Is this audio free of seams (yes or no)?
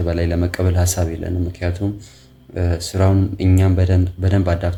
yes